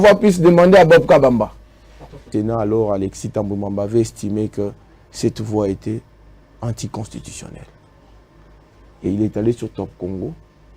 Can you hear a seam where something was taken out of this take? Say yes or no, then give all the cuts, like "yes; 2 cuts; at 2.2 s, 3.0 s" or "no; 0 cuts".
yes; 1 cut; at 2.3 s